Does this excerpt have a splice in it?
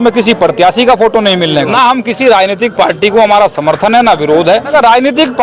yes; 2 cuts; at 1.7 s, 4.7 s

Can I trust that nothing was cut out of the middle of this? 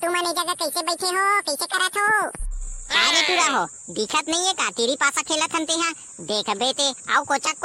yes; 0 cuts

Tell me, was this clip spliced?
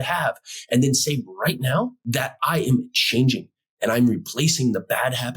yes; 1 cut; at 2.0 s

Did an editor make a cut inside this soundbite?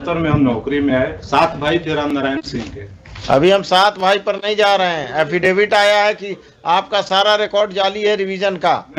no; 0 cuts

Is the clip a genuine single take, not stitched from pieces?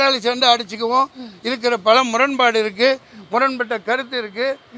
yes; 0 cuts

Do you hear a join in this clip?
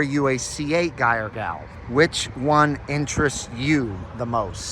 yes; 1 cut; at 1.7 s

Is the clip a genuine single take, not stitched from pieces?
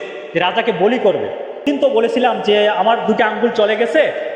no; 1 cut; at 1.6 s

